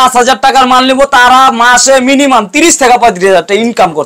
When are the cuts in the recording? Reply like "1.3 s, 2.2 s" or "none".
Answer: none